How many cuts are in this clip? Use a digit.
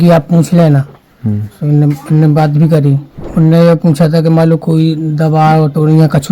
1